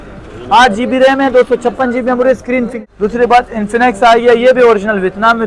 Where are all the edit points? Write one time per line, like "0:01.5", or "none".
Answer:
0:02.7